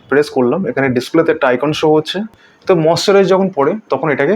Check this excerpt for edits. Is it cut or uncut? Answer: cut